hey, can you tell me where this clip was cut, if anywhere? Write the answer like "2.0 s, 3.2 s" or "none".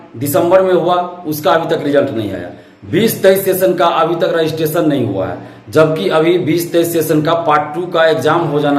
none